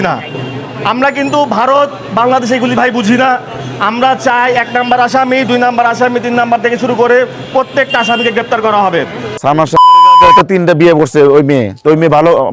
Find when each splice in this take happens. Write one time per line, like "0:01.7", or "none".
0:09.3